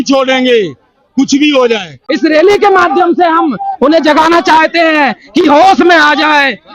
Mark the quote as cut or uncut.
cut